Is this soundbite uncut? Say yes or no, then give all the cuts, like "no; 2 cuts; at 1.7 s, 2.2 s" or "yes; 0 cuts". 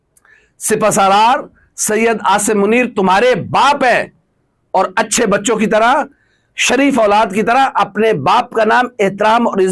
yes; 0 cuts